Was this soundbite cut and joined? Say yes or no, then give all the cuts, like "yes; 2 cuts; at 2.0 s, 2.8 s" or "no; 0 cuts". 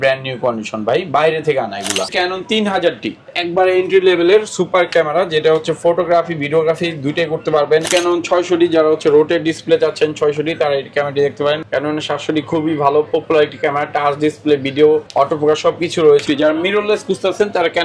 yes; 4 cuts; at 2.0 s, 7.9 s, 11.6 s, 16.2 s